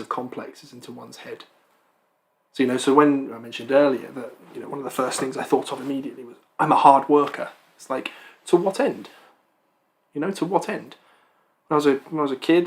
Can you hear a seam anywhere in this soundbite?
no; 0 cuts

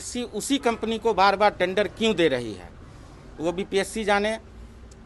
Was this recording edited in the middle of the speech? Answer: no; 0 cuts

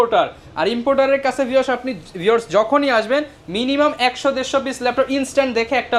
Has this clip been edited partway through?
no; 0 cuts

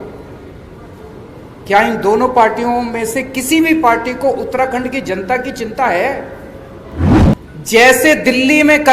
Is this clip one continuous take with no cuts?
no; 1 cut; at 7.2 s

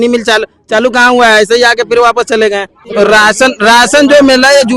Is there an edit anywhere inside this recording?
yes; 1 cut; at 2.8 s

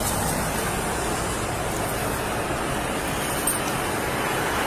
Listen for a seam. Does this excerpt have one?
no; 0 cuts

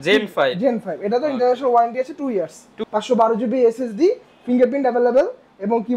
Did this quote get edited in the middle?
yes; 1 cut; at 2.7 s

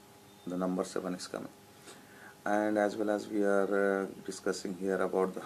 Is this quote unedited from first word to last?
yes; 0 cuts

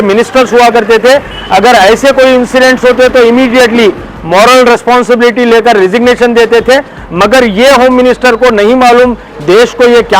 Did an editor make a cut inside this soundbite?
no; 0 cuts

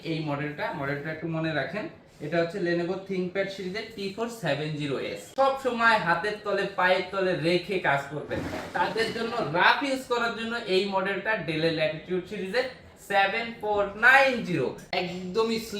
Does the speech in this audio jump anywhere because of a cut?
yes; 2 cuts; at 5.2 s, 14.8 s

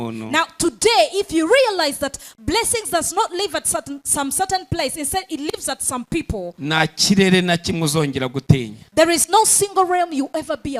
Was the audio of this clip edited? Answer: no; 0 cuts

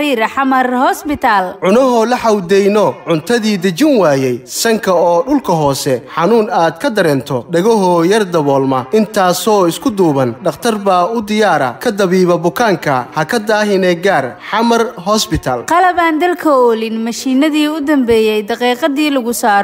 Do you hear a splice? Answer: yes; 1 cut; at 1.5 s

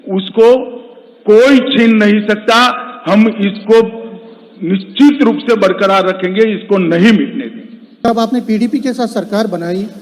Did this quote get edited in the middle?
yes; 1 cut; at 8.1 s

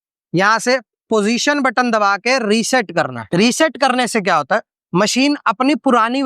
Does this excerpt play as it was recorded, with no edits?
no; 1 cut; at 3.2 s

